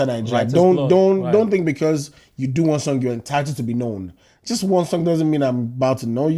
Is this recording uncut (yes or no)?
yes